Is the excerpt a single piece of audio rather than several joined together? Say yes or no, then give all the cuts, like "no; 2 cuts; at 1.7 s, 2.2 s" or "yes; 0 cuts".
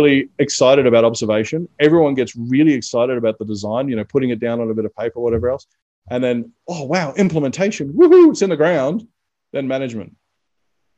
yes; 0 cuts